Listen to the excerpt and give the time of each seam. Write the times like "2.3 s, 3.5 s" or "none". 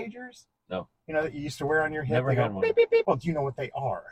3.0 s